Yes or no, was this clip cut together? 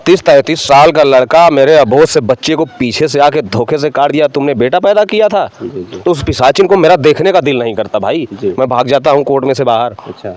no